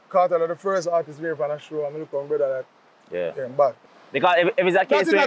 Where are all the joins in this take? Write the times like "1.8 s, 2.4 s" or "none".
3.9 s